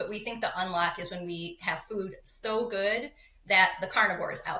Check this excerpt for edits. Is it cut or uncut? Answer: uncut